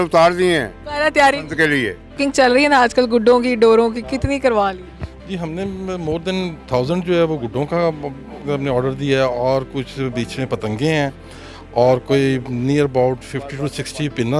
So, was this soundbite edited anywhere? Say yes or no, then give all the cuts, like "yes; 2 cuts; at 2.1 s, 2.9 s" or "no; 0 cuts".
yes; 2 cuts; at 0.8 s, 2.2 s